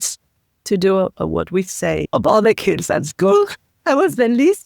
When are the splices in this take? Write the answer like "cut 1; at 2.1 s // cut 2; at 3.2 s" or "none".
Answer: cut 1; at 2.0 s